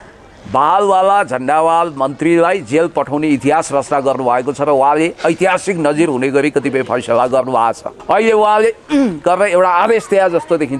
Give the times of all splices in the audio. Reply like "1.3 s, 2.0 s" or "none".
7.9 s